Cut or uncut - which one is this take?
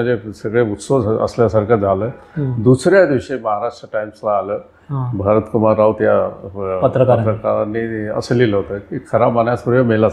uncut